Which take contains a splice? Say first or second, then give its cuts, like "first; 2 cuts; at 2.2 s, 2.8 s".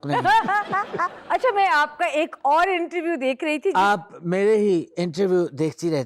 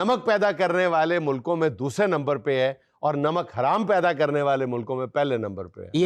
first; 1 cut; at 1.1 s